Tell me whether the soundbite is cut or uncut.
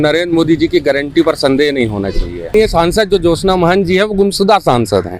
cut